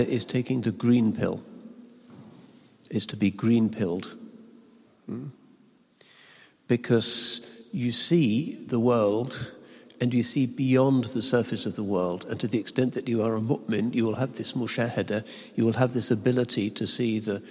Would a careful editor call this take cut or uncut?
uncut